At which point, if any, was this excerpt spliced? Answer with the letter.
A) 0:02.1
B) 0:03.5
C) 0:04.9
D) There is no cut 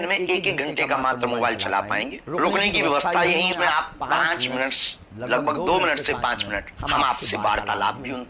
B